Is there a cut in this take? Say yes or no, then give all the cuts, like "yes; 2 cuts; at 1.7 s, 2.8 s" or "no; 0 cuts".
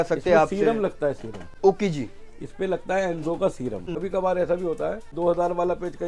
yes; 2 cuts; at 3.9 s, 5.1 s